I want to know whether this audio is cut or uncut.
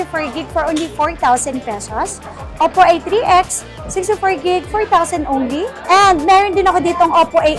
cut